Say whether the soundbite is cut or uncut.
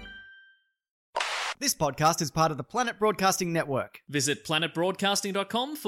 cut